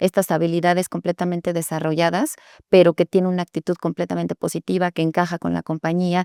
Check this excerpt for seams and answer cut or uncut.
uncut